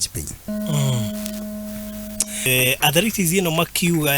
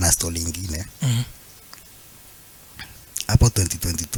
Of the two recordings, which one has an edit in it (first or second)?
first